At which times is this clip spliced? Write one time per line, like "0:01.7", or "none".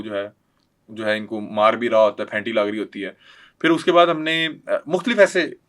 none